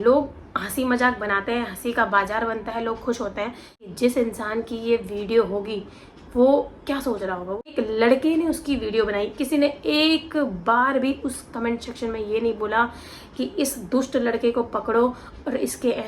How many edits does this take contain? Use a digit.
2